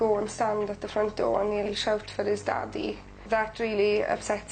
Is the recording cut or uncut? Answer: cut